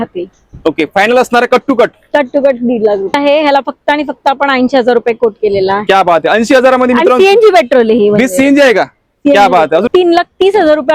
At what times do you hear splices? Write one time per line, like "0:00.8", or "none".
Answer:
0:03.1
0:09.9